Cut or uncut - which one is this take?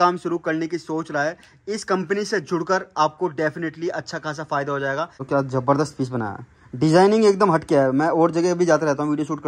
cut